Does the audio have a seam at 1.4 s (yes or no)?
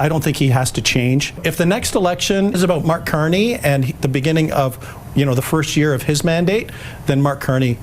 yes